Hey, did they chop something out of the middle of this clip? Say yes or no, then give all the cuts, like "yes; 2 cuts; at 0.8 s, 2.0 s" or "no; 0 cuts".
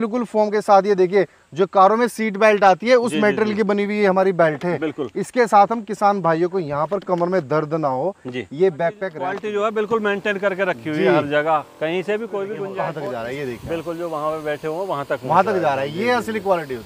yes; 2 cuts; at 9.4 s, 12.6 s